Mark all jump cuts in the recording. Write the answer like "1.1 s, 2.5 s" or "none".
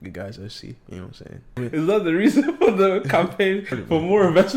1.6 s, 3.6 s